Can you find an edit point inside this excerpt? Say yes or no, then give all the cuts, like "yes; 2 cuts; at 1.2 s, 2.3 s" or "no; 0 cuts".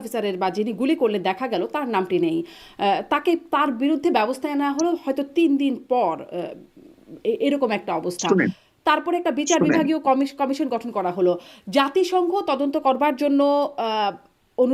no; 0 cuts